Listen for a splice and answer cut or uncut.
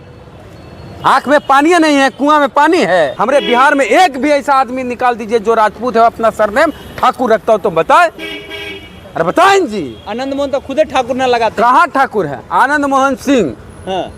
cut